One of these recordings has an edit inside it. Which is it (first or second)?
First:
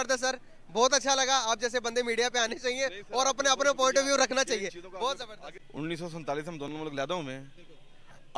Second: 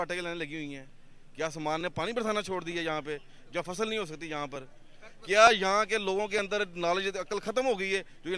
first